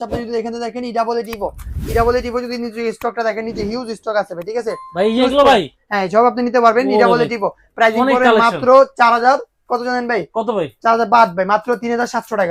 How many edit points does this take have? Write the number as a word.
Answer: zero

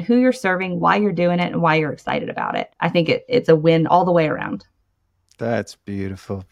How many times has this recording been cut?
one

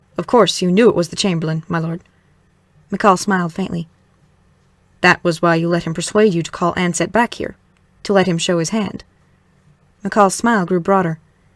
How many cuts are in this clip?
one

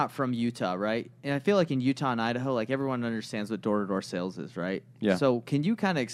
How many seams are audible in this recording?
zero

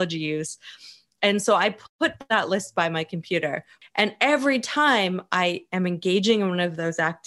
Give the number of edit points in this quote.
one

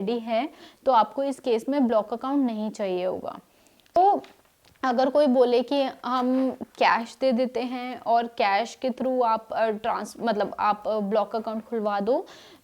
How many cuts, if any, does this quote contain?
one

